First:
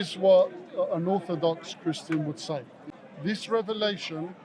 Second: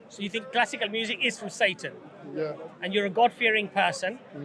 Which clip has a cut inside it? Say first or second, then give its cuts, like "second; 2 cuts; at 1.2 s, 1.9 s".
first; 1 cut; at 2.8 s